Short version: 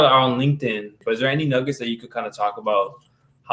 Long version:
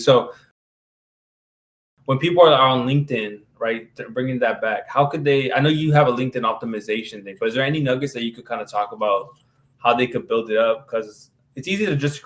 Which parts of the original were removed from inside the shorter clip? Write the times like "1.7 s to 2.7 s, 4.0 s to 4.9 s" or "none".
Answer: 3.4 s to 7.2 s